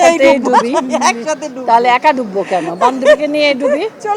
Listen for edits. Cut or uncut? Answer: uncut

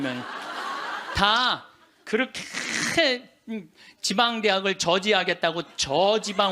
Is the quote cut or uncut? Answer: uncut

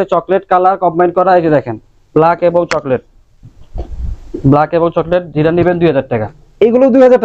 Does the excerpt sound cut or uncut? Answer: uncut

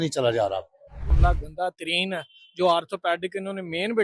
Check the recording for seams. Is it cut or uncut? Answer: cut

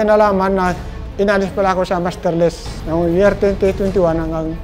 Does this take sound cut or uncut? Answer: uncut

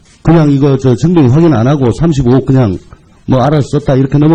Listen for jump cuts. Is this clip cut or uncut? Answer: uncut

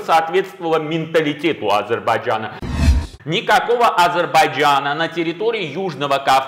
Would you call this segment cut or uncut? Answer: cut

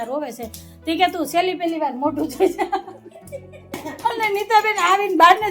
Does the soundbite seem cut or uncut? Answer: cut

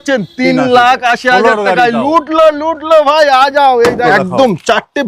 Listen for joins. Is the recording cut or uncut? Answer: cut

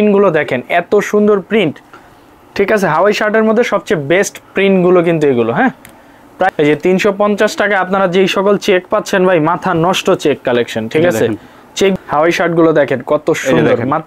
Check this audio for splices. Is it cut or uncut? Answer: cut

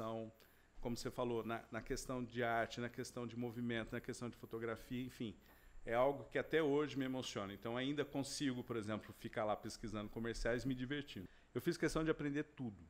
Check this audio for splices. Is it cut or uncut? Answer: cut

